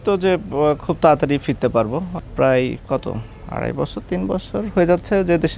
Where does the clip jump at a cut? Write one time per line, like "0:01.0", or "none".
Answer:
0:02.1